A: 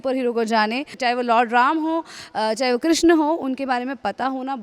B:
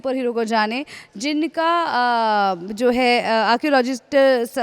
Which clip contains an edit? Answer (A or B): A